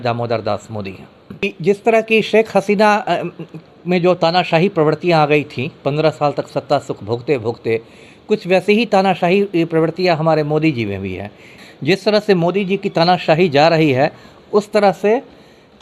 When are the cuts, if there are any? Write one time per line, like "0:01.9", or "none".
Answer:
0:01.4
0:11.5